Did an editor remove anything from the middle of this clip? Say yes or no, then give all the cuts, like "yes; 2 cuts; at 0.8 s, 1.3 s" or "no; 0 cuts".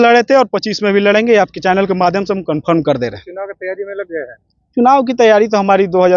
no; 0 cuts